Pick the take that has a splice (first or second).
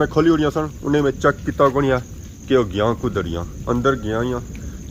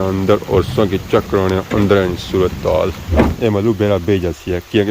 second